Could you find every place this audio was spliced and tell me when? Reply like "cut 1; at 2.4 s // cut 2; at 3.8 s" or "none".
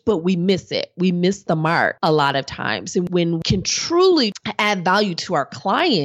cut 1; at 2.0 s // cut 2; at 3.1 s // cut 3; at 4.4 s